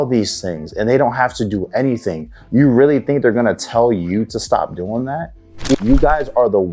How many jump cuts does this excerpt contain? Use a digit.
1